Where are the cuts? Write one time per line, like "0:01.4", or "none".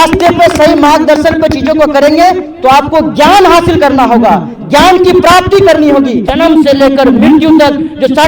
0:06.2